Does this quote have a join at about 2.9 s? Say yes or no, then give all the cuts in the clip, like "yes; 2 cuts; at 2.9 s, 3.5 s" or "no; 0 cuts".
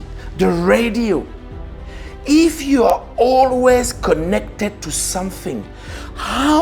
no; 0 cuts